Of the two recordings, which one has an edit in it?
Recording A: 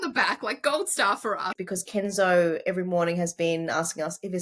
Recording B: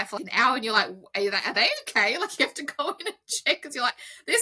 A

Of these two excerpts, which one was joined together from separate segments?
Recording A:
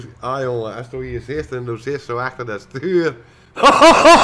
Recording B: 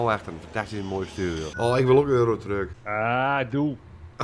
B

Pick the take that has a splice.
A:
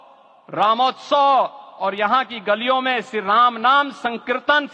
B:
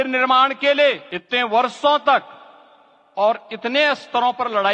B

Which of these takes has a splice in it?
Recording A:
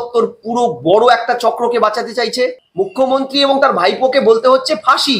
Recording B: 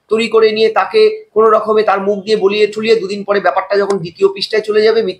A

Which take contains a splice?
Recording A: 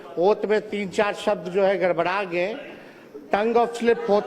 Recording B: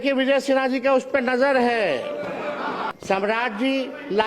B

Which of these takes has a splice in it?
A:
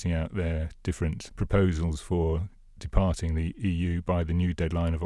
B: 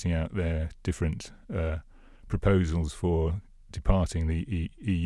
A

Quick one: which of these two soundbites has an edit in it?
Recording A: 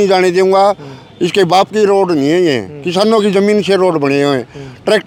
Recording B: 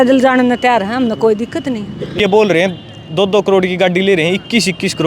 B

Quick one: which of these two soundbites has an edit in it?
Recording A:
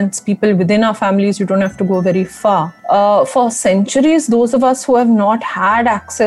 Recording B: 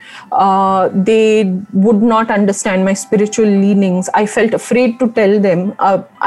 A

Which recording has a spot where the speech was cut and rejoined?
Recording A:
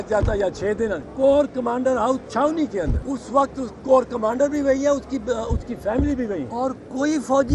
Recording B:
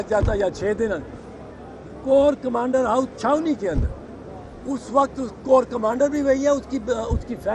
A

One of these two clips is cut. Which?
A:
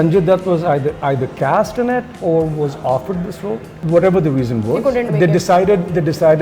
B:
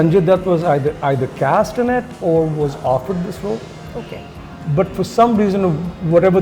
A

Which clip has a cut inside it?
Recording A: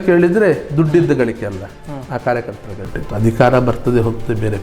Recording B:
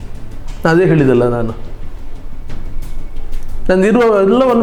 A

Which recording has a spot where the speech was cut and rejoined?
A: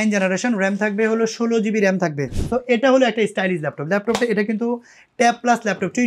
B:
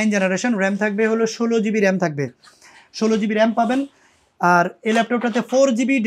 A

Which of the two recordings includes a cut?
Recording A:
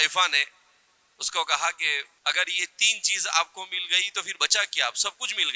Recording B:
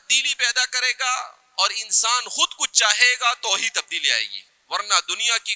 A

